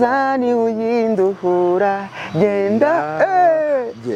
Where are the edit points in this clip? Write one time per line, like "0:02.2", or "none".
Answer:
none